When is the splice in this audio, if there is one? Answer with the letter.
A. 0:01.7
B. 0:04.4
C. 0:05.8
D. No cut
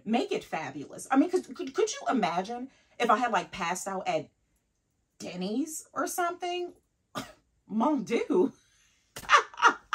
D